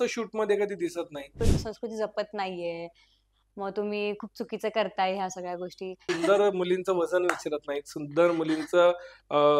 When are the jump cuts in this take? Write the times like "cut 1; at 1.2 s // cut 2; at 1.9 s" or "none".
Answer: cut 1; at 1.3 s // cut 2; at 6.0 s